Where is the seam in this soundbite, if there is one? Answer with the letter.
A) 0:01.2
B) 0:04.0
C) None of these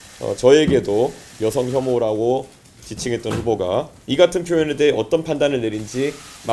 B